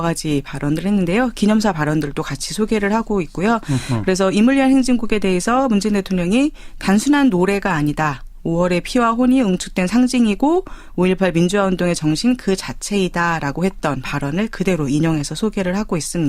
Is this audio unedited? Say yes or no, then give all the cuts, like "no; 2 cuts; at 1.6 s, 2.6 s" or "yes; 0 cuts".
no; 1 cut; at 11.1 s